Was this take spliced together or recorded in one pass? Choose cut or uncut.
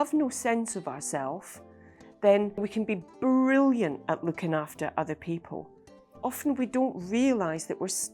cut